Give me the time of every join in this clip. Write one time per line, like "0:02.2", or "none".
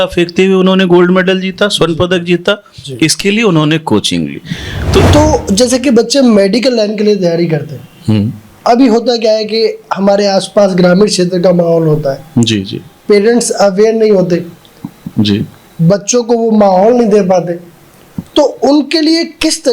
0:05.0